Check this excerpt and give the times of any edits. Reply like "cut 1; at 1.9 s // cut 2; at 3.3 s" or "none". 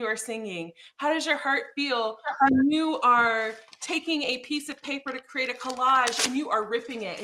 none

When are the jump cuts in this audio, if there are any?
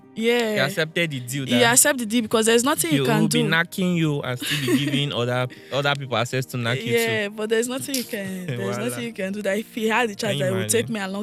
none

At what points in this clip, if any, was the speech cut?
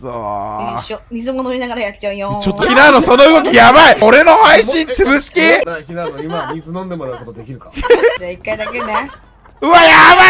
cut 1; at 2.6 s // cut 2; at 4.0 s // cut 3; at 5.7 s // cut 4; at 8.2 s

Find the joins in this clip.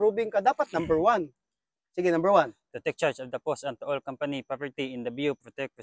none

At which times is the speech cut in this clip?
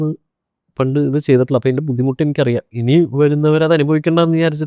cut 1; at 2.7 s

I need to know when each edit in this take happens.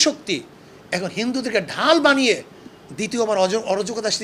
none

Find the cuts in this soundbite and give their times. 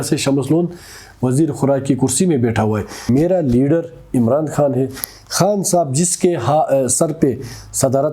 cut 1; at 2.9 s

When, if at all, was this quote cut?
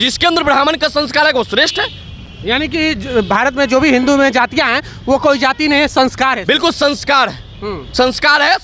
none

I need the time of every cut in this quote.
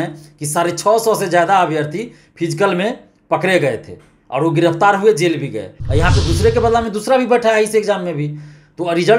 cut 1; at 5.8 s

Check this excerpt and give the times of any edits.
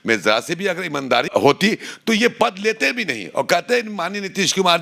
cut 1; at 1.3 s

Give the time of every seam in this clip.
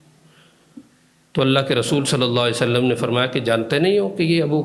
none

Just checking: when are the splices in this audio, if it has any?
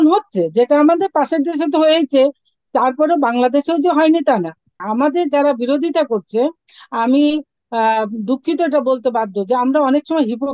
cut 1; at 4.7 s

